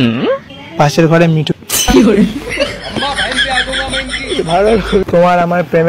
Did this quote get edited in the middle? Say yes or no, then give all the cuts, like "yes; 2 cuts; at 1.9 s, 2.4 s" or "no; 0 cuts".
yes; 2 cuts; at 1.5 s, 5.0 s